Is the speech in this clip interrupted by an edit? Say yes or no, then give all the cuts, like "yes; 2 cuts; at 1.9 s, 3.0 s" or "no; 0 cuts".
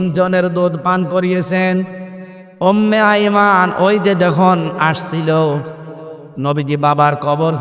no; 0 cuts